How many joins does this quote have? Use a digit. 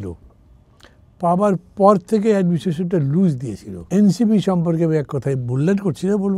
1